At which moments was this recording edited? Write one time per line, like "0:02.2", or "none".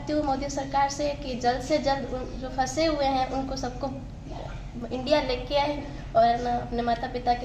none